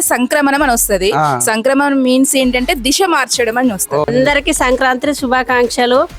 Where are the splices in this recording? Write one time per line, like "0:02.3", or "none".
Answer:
0:04.1